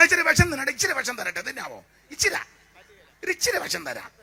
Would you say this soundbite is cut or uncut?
uncut